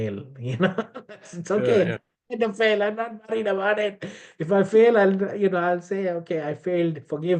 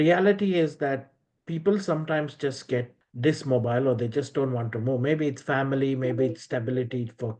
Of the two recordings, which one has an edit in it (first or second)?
second